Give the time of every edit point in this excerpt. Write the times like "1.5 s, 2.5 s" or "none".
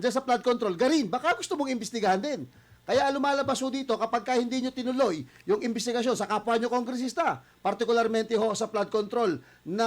2.6 s